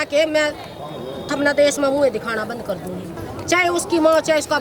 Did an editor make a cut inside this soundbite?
yes; 1 cut; at 3.2 s

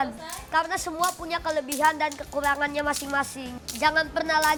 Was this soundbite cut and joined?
no; 0 cuts

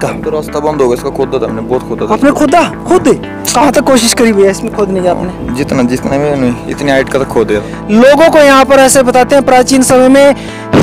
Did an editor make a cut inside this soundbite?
yes; 1 cut; at 7.7 s

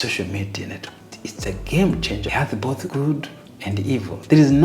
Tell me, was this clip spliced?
yes; 2 cuts; at 1.0 s, 2.4 s

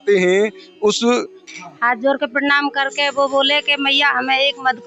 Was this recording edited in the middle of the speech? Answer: yes; 1 cut; at 1.4 s

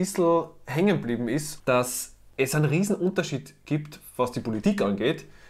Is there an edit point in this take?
yes; 1 cut; at 1.5 s

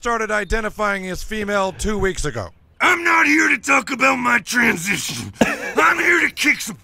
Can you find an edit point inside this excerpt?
no; 0 cuts

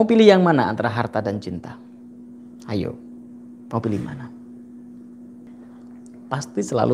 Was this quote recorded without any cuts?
no; 1 cut; at 5.5 s

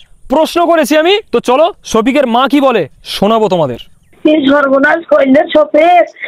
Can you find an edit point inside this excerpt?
yes; 2 cuts; at 1.2 s, 4.1 s

